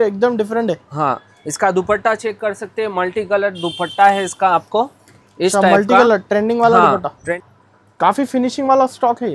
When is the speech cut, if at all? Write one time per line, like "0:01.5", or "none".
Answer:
0:07.3